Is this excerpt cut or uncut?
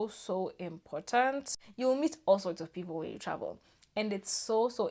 cut